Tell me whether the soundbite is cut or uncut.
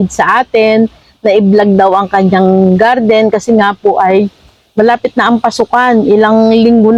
uncut